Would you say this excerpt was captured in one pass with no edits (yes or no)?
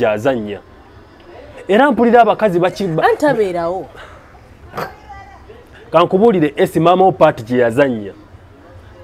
yes